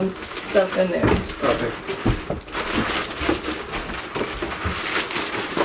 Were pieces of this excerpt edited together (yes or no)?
no